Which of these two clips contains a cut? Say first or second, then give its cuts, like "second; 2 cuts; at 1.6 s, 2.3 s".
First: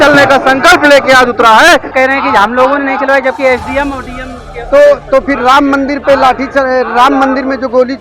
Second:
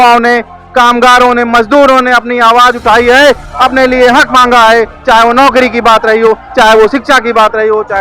first; 1 cut; at 1.9 s